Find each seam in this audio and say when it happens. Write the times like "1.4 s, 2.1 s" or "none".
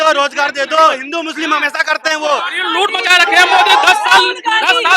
1.0 s, 2.6 s